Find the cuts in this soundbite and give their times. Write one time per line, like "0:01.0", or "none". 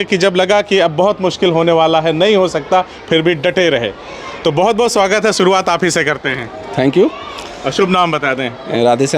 none